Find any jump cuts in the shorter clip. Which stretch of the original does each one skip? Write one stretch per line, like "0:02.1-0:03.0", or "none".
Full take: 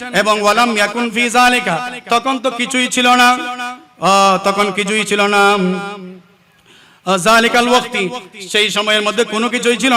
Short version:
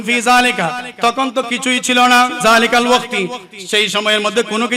0:03.5-0:07.2